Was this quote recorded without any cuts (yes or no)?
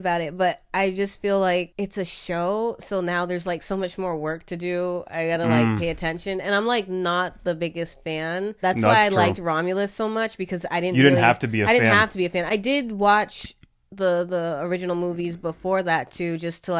yes